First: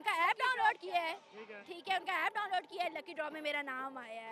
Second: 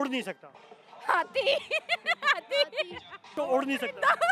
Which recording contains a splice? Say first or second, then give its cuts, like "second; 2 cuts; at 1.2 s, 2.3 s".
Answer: second; 1 cut; at 3.4 s